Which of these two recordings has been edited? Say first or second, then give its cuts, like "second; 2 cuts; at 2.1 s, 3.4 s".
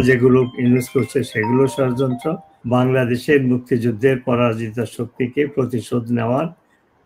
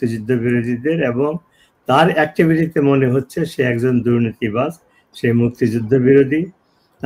first; 1 cut; at 2.5 s